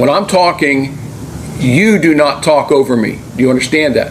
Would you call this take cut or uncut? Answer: uncut